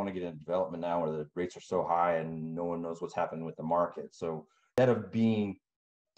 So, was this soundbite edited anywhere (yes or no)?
yes